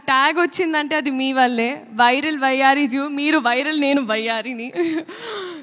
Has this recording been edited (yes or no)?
no